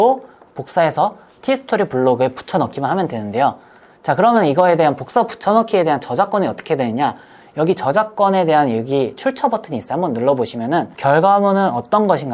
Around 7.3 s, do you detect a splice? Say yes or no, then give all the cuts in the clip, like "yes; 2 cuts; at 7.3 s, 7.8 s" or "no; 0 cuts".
no; 1 cut; at 10.9 s